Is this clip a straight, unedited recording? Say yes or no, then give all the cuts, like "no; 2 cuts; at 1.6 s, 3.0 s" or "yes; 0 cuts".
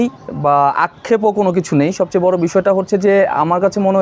yes; 0 cuts